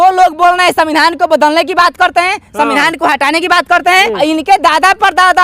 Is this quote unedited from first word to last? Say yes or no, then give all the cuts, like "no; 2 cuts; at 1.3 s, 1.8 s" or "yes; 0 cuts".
no; 1 cut; at 4.1 s